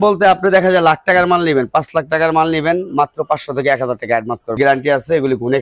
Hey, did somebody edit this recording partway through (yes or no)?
yes